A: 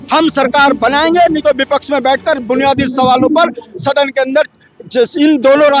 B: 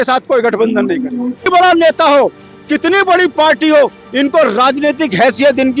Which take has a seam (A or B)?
B